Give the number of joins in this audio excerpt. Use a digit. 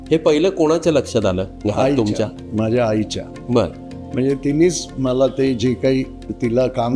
0